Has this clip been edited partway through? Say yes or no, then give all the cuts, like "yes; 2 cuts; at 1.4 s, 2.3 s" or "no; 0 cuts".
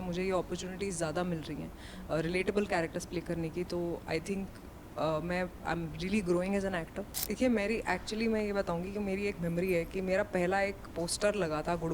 yes; 1 cut; at 7.3 s